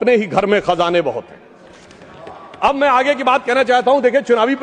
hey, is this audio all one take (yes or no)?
yes